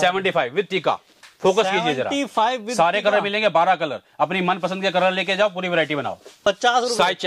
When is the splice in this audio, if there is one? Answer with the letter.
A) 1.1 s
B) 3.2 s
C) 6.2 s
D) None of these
D